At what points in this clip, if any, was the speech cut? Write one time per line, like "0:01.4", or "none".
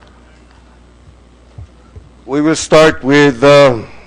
0:01.8